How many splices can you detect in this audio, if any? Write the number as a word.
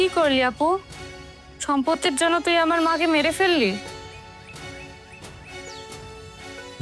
zero